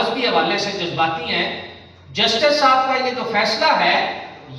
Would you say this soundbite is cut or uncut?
uncut